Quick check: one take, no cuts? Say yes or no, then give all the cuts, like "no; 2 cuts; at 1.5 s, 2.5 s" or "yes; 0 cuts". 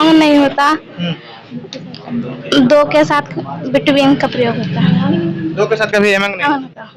yes; 0 cuts